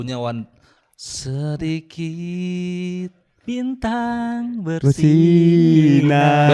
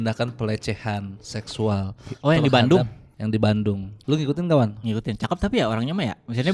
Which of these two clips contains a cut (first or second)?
second